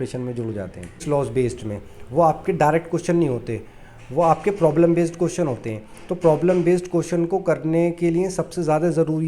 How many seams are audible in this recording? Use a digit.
1